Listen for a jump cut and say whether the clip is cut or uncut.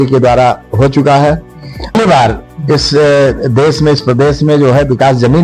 cut